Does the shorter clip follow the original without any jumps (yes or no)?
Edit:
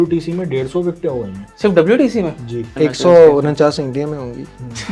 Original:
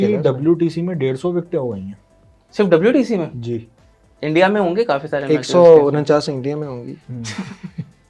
no